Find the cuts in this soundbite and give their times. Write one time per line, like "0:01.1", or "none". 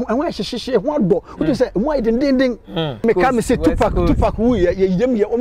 0:03.0